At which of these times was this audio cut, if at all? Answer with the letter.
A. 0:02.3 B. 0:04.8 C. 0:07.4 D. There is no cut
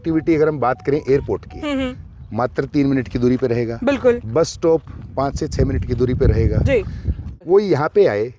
C